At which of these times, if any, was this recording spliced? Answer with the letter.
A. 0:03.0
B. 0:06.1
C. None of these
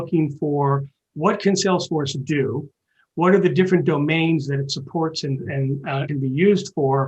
B